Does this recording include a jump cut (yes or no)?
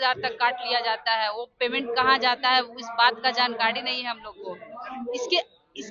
no